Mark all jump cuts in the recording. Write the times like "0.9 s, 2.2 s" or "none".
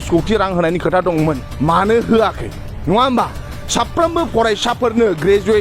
1.5 s

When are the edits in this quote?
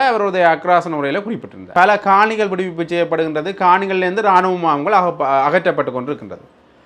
1.7 s

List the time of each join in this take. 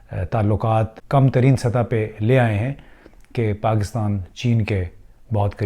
1.0 s

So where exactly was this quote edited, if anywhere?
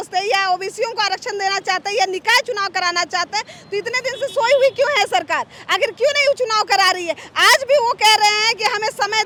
none

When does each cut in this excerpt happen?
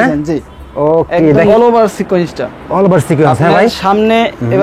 1.6 s

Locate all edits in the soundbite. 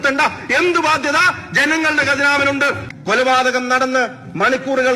2.8 s

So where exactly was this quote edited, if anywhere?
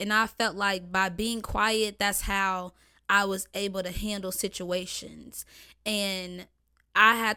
none

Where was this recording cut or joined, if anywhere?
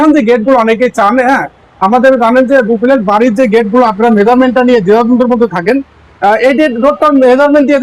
none

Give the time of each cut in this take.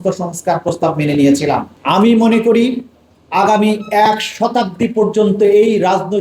1.7 s

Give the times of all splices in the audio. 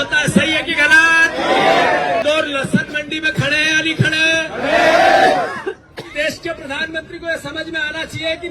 2.2 s, 6.1 s

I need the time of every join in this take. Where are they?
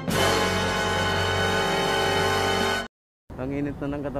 3.0 s

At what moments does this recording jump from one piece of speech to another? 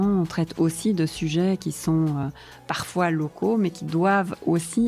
2.2 s

